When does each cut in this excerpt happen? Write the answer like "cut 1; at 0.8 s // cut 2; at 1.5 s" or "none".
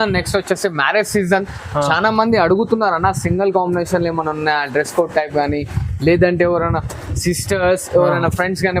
none